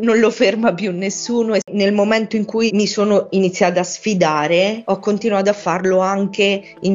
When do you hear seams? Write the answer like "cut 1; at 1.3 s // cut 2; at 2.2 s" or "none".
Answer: cut 1; at 1.7 s